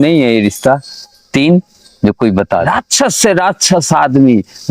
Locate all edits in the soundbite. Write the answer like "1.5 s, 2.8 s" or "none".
2.7 s